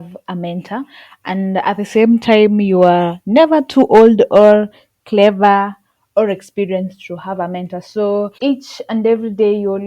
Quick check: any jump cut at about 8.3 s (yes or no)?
yes